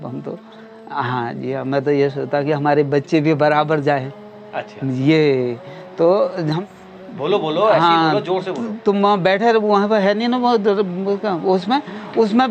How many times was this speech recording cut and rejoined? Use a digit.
0